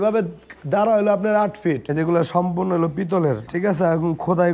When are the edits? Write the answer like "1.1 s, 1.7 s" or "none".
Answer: 1.8 s, 3.5 s